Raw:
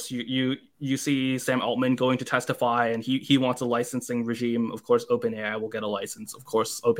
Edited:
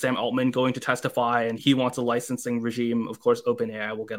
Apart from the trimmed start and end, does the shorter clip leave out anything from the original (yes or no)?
yes